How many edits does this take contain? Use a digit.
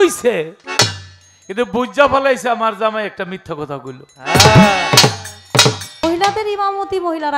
1